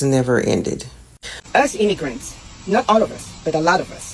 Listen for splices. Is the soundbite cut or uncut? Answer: cut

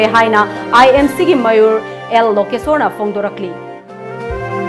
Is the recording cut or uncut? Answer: uncut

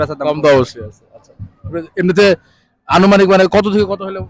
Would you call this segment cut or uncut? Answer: uncut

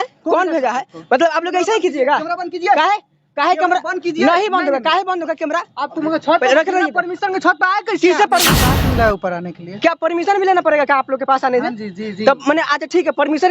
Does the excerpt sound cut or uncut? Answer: cut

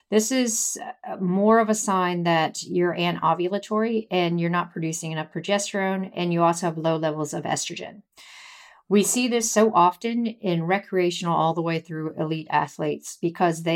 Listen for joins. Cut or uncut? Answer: uncut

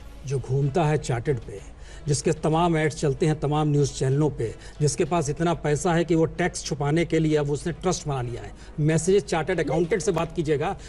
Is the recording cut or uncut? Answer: uncut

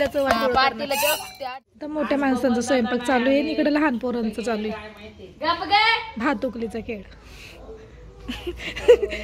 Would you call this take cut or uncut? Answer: cut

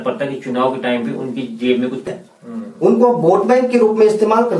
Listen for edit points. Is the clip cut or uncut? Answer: cut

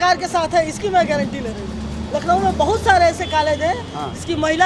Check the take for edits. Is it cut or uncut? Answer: uncut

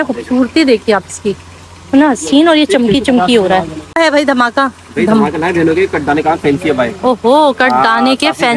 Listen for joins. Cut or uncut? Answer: cut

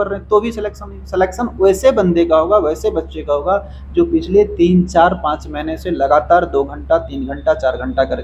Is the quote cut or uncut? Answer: uncut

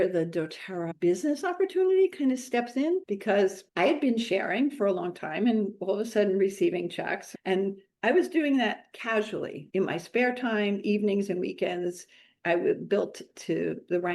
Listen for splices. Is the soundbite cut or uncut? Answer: cut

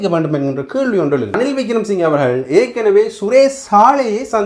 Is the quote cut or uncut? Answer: cut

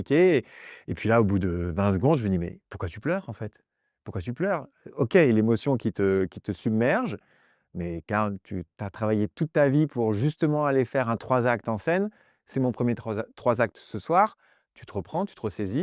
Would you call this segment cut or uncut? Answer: uncut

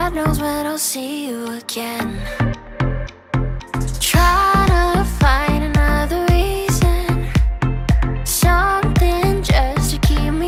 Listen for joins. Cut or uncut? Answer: uncut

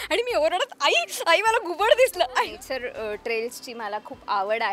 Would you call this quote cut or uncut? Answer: cut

